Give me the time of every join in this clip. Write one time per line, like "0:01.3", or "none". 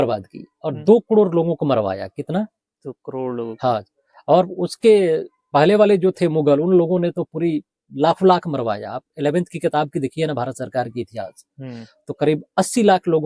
none